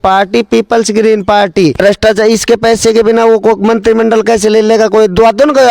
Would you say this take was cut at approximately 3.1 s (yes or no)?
no